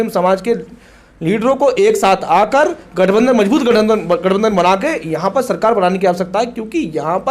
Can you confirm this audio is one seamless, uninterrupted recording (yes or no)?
yes